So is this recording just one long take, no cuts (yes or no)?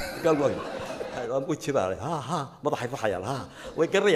no